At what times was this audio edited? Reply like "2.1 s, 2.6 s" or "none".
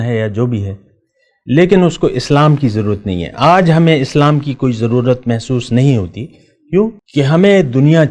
7.0 s

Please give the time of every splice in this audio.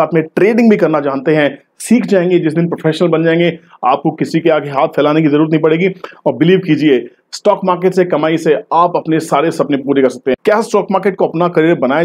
10.4 s

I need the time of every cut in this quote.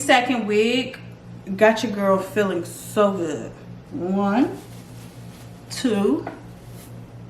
3.8 s

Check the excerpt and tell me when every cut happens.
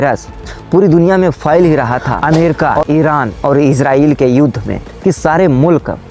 2.1 s

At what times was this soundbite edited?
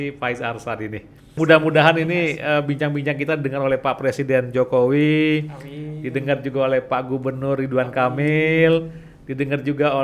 1.3 s

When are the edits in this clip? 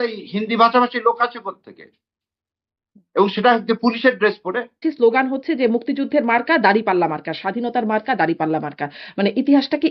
4.8 s

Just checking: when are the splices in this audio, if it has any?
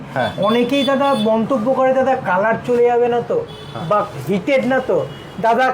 4.1 s

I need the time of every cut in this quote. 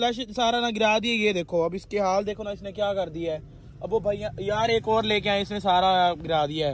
none

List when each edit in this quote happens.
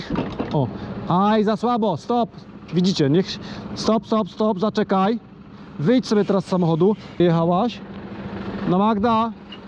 7.2 s

